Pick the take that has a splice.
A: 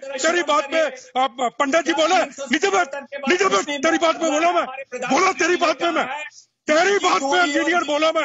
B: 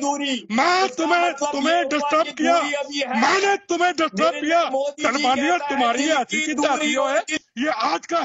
B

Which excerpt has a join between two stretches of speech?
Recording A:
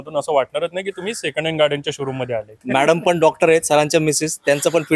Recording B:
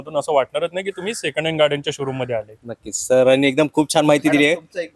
A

